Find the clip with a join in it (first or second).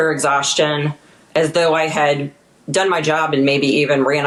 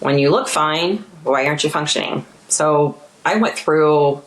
second